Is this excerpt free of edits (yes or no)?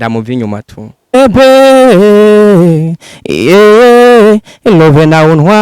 no